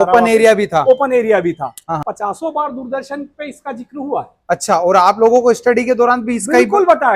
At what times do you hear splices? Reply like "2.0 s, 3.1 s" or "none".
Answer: 2.0 s